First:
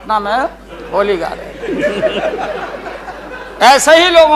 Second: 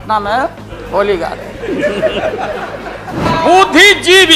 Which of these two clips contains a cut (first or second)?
second